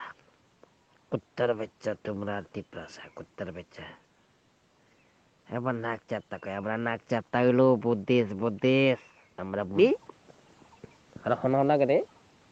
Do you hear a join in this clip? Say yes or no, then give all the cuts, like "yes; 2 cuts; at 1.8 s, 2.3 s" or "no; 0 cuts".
yes; 1 cut; at 9.8 s